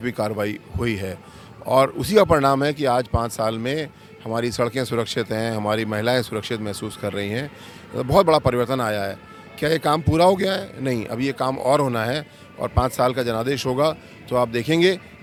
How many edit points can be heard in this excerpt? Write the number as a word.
zero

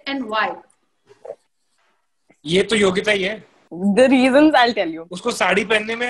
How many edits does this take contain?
one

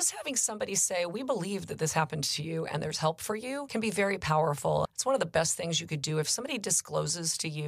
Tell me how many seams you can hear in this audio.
two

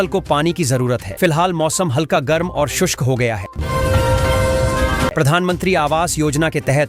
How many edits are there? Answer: two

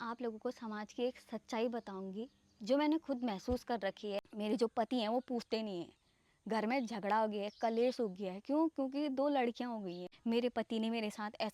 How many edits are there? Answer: two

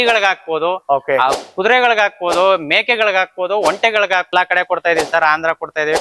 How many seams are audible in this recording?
one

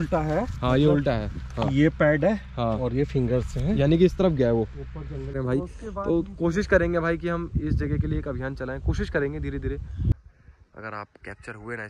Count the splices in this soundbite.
two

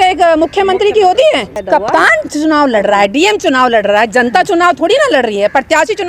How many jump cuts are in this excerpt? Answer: one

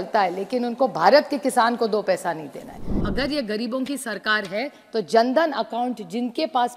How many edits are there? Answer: one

